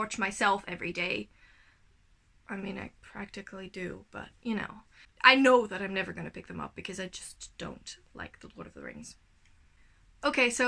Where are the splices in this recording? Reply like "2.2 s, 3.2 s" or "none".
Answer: none